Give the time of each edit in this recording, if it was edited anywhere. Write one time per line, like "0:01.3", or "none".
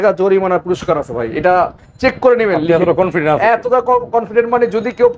none